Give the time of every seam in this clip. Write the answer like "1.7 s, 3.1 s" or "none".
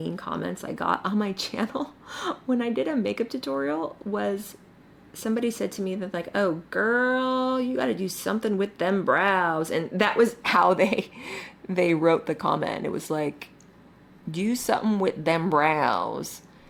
none